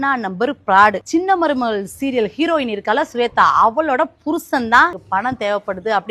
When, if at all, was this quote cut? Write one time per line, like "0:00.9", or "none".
0:01.0
0:05.0